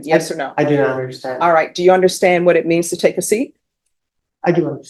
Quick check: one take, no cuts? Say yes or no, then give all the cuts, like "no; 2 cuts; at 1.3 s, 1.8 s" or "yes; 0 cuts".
yes; 0 cuts